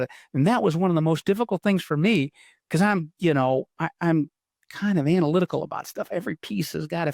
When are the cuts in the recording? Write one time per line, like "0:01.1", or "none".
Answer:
none